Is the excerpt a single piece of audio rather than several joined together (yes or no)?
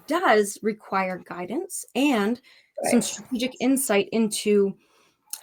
yes